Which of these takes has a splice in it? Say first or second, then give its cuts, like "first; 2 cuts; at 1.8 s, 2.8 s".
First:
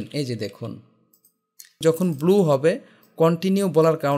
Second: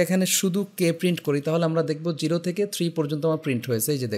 first; 1 cut; at 1.7 s